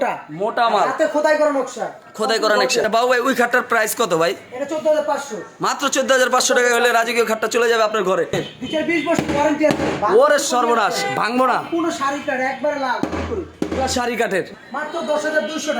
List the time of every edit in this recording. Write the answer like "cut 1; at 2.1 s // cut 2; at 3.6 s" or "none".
cut 1; at 2.8 s // cut 2; at 8.5 s // cut 3; at 14.6 s